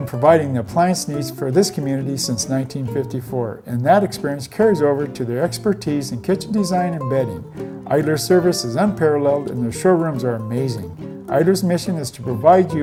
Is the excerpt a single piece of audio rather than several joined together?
yes; 0 cuts

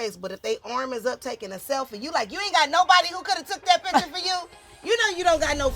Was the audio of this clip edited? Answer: no; 0 cuts

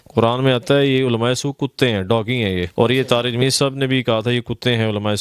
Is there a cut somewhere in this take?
yes; 1 cut; at 2.7 s

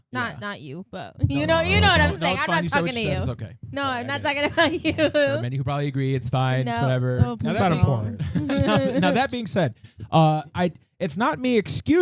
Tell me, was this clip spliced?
no; 0 cuts

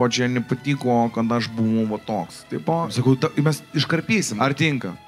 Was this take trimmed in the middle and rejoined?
yes; 2 cuts; at 2.9 s, 4.3 s

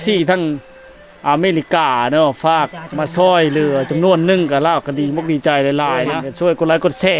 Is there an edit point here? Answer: yes; 1 cut; at 6.2 s

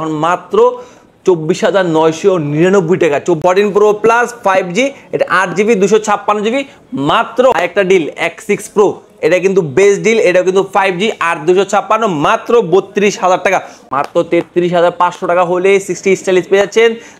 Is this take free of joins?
no; 3 cuts; at 3.4 s, 7.5 s, 13.8 s

